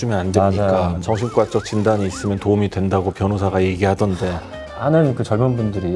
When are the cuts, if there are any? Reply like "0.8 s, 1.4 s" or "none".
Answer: 1.0 s, 4.7 s

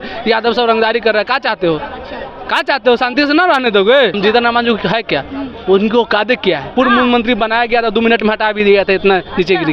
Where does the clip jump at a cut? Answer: 4.2 s, 6.7 s

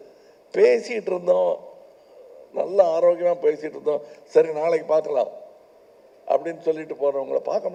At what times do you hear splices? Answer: none

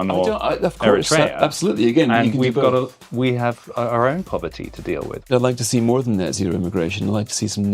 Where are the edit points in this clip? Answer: 5.3 s

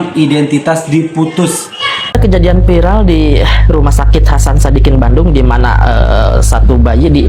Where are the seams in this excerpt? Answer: 2.0 s

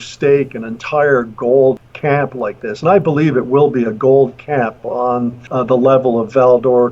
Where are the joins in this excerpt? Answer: 1.9 s, 5.4 s

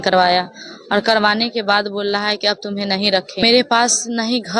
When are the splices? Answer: 3.4 s

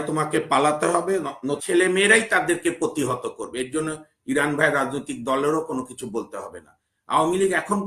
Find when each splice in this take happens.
1.6 s

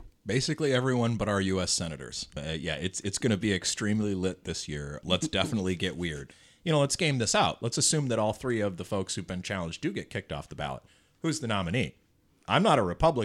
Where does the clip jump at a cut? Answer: 6.2 s

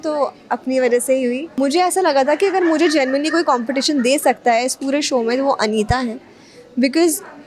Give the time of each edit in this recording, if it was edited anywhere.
1.6 s

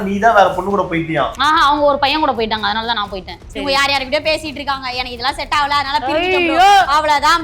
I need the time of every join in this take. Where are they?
3.4 s

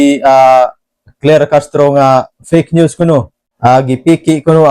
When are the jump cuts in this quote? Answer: 3.4 s

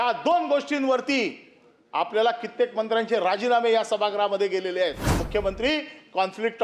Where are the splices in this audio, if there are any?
5.1 s

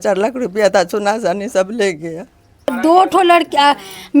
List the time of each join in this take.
2.8 s

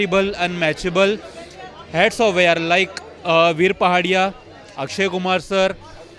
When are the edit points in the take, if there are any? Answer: none

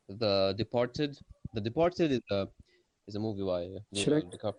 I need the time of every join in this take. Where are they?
none

